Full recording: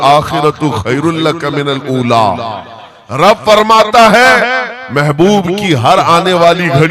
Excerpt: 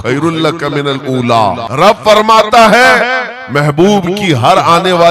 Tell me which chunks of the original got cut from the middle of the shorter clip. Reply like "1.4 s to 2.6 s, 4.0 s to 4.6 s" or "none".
2.5 s to 3.1 s

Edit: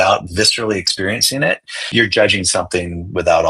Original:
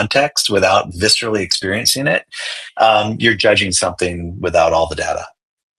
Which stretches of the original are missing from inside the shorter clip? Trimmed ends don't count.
2.5 s to 3.1 s

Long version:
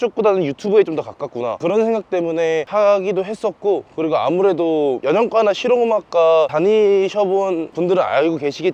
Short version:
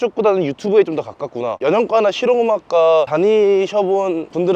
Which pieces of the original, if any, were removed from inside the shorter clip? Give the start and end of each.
1.6 s to 5.0 s

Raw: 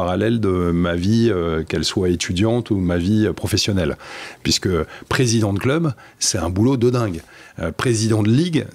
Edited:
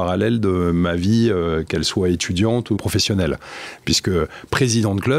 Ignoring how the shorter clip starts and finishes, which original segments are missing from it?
2.8 s to 3.4 s

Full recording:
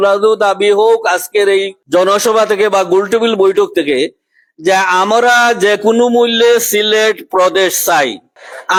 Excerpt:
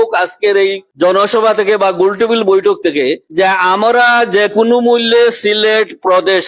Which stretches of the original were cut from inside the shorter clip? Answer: 4.2 s to 4.5 s

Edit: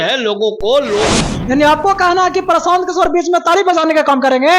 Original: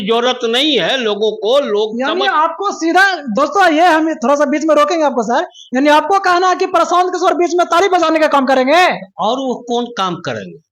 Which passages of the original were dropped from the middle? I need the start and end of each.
2.0 s to 5.5 s

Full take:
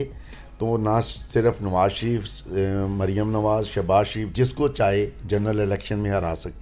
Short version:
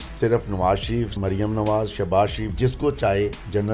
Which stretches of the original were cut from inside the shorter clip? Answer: 2.3 s to 2.9 s

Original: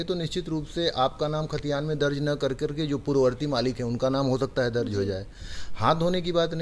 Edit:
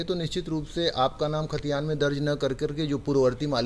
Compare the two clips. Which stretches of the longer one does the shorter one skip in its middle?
none

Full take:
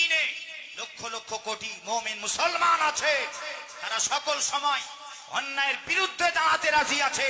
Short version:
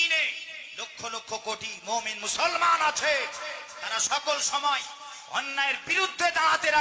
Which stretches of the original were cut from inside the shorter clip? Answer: none

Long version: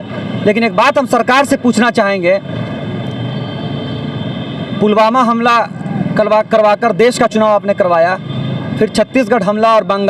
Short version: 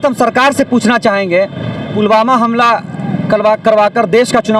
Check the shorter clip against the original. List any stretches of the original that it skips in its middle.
2.8 s to 4.7 s

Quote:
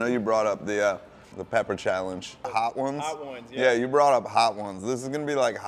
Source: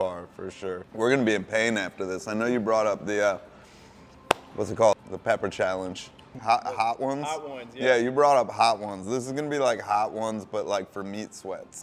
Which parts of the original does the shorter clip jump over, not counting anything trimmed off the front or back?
3.8 s to 5.1 s, 6.2 s to 6.7 s

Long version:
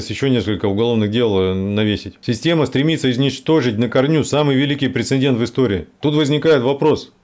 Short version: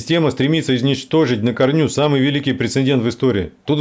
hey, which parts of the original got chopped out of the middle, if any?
none

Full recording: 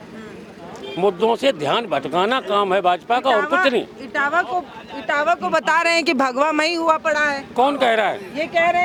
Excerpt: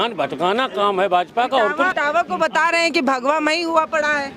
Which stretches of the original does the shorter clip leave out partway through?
3.6 s to 5.0 s

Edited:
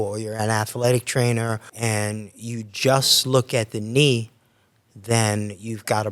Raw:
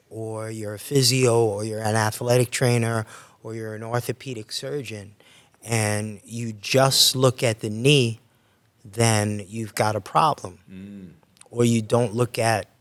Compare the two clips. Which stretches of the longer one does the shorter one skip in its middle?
3.1 s to 5.6 s

